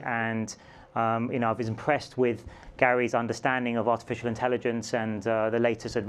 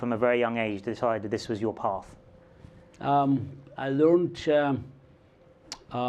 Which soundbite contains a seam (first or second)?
second